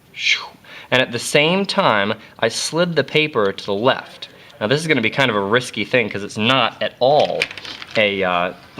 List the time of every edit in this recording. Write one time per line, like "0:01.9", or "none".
0:02.7